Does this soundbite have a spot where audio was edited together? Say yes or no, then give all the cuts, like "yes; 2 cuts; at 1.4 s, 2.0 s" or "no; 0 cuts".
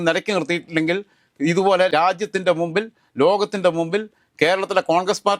no; 0 cuts